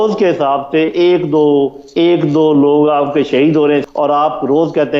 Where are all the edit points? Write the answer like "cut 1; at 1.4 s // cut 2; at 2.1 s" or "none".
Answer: cut 1; at 3.8 s